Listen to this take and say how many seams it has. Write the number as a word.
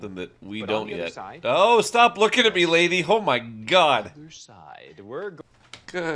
zero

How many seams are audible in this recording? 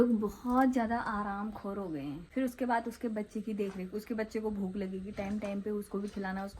one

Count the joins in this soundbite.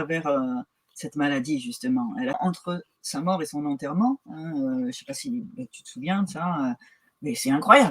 one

